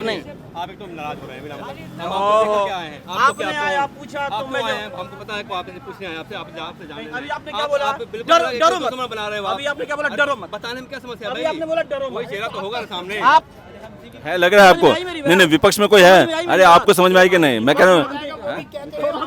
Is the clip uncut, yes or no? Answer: no